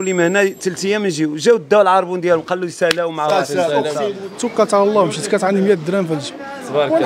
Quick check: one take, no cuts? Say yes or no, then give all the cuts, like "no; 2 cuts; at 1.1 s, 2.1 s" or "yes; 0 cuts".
no; 1 cut; at 4.1 s